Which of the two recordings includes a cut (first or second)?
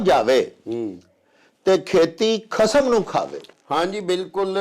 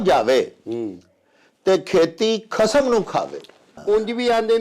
second